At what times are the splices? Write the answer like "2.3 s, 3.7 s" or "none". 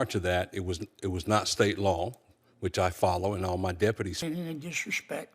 4.2 s